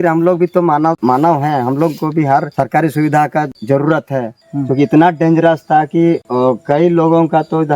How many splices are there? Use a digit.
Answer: 4